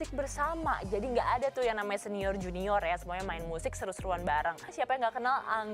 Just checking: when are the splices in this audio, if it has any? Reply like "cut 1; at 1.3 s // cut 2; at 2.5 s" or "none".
cut 1; at 4.7 s